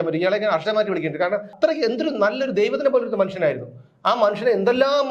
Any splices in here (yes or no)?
yes